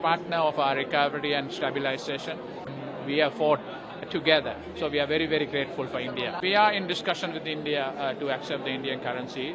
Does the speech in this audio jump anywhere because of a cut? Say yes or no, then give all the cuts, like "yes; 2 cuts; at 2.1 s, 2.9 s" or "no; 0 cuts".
yes; 2 cuts; at 2.8 s, 6.4 s